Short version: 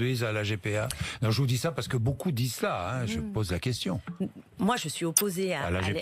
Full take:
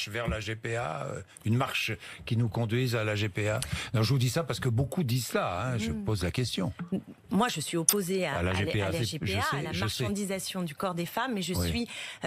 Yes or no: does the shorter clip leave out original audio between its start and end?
no